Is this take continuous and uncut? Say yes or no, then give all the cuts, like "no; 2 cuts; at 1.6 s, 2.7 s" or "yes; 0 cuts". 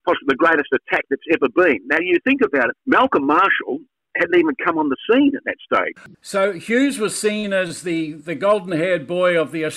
no; 2 cuts; at 2.8 s, 5.9 s